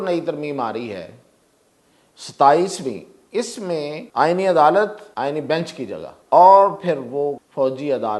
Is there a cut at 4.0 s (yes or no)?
yes